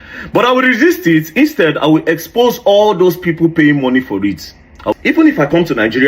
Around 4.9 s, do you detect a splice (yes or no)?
yes